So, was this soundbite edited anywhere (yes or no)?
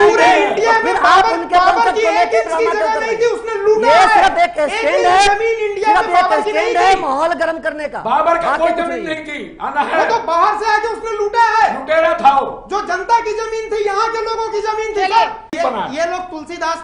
yes